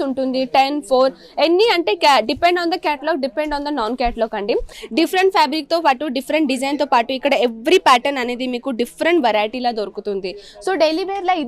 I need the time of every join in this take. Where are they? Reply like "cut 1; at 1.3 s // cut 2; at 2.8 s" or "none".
cut 1; at 4.7 s